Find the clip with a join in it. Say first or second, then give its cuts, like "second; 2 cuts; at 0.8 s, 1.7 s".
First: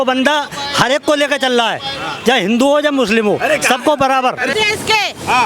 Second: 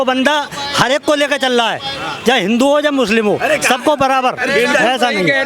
first; 1 cut; at 4.5 s